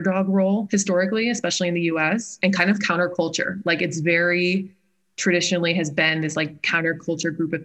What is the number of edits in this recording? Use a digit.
1